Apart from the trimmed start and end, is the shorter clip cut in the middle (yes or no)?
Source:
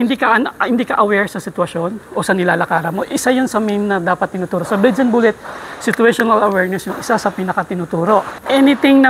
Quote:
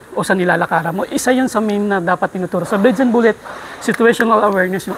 no